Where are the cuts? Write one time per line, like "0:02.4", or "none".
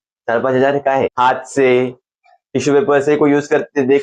0:01.1